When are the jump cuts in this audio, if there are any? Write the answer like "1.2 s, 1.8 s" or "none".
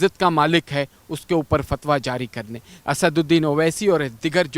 2.7 s